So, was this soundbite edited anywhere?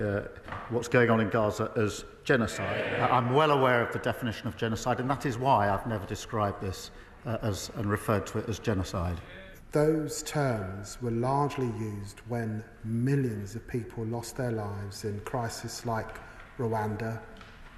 yes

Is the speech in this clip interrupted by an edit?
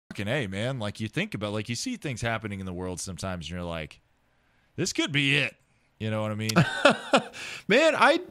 no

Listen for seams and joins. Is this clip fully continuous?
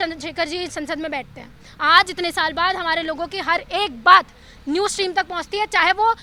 yes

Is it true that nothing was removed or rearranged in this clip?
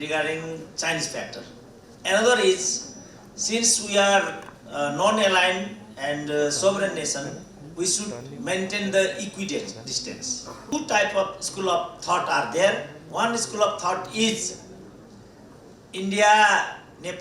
no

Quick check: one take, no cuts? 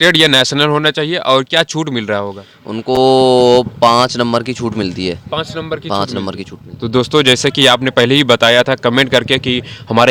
yes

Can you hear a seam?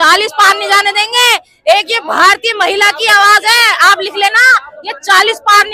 no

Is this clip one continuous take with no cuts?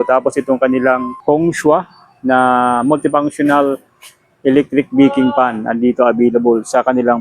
no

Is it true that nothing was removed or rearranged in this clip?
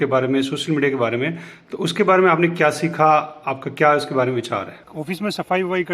no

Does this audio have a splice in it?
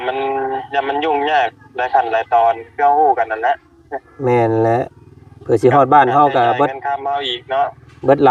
no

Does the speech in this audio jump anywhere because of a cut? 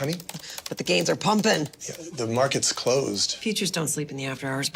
yes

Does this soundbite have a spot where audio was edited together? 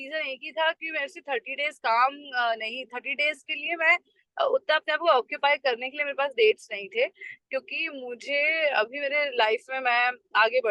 no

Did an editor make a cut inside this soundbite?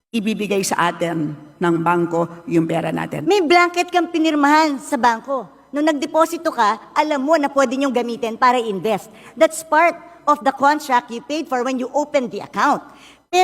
yes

